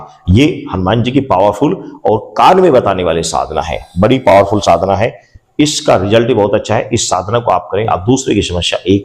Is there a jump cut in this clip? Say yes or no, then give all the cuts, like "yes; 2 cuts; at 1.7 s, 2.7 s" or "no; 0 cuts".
yes; 1 cut; at 7.9 s